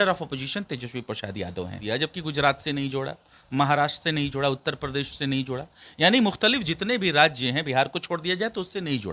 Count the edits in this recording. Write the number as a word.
one